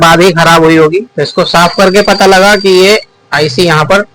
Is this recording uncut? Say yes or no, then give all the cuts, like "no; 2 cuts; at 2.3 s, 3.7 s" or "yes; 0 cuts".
no; 1 cut; at 1.2 s